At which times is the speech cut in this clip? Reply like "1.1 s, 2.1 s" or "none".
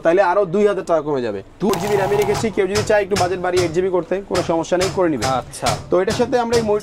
1.7 s